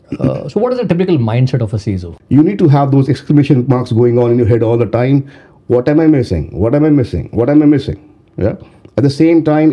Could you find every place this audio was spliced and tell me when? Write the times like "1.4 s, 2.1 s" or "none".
2.1 s